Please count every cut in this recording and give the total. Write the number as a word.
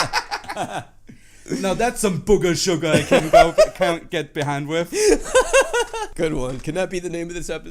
one